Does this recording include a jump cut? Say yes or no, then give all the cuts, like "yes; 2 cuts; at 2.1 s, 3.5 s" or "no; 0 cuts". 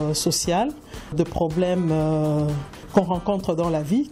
yes; 2 cuts; at 1.1 s, 2.9 s